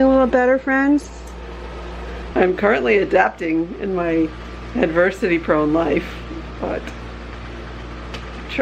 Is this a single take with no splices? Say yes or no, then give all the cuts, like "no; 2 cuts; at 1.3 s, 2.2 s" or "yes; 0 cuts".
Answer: no; 1 cut; at 2.2 s